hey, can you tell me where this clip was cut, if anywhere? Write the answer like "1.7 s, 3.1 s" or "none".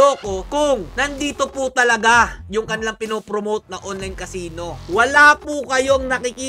4.8 s